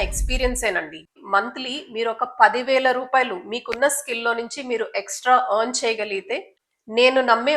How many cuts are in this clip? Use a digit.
2